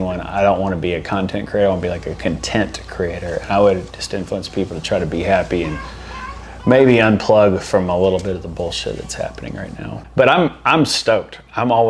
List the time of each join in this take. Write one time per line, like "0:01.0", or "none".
0:09.9

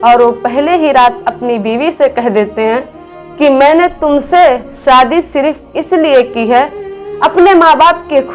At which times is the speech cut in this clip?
none

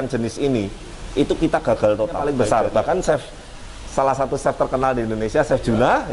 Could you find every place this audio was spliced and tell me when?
0:02.3

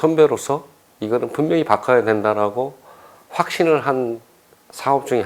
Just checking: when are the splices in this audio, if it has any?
none

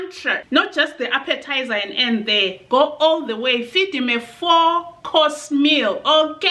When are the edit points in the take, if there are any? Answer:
none

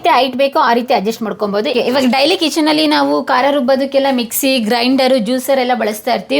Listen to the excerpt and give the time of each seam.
0:01.7

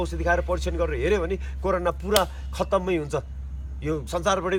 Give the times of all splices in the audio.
none

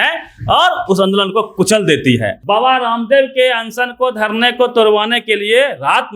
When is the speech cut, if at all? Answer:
0:02.3

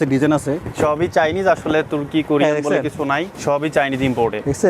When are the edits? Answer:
0:03.3

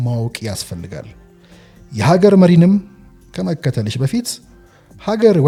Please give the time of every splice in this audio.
none

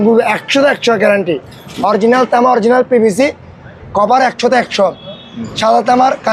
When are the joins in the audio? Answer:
none

